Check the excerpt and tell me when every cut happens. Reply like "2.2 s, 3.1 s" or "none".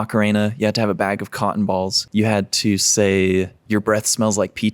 2.0 s